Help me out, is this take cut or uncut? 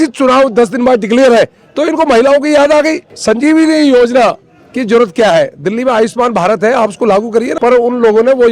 cut